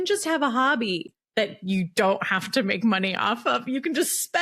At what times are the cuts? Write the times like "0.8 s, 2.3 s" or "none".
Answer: none